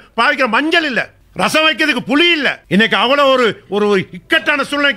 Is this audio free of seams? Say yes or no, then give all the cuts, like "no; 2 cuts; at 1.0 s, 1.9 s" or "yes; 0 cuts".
no; 2 cuts; at 1.2 s, 2.6 s